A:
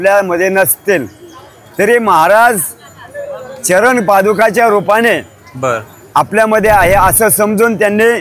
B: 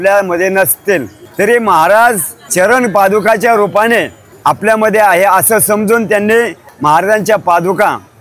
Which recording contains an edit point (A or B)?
B